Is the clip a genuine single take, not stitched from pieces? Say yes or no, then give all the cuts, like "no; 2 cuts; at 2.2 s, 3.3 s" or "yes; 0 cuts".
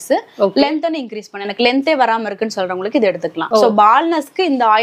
yes; 0 cuts